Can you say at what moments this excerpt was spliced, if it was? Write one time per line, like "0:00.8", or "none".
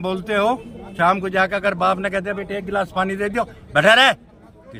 none